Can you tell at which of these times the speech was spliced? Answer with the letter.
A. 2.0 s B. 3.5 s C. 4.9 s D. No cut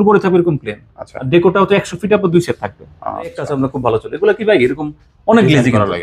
B